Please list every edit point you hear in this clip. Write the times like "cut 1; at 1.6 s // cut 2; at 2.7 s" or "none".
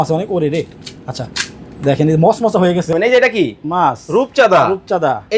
cut 1; at 2.9 s